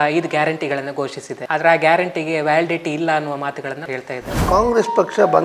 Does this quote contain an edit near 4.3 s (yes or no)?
yes